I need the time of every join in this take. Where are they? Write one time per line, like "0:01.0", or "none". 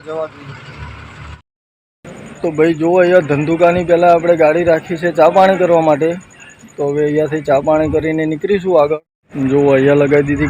0:01.5